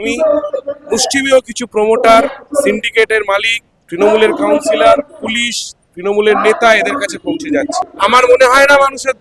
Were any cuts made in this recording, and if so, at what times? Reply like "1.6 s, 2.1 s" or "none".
7.9 s